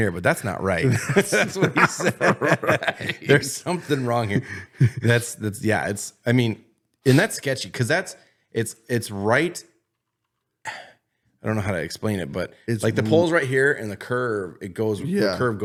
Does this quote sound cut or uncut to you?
uncut